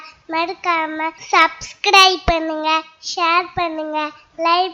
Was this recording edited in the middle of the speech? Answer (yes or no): yes